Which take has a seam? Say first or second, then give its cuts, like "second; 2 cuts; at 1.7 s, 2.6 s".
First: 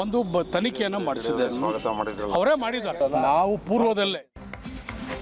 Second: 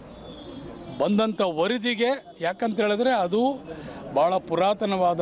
first; 1 cut; at 4.2 s